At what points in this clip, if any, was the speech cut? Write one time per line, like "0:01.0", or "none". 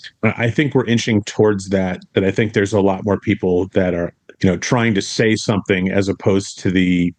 none